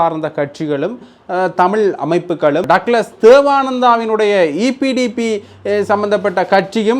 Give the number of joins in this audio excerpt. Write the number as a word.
one